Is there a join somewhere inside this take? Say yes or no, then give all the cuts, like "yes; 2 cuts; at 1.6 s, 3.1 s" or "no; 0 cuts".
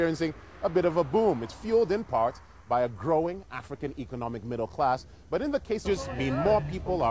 no; 0 cuts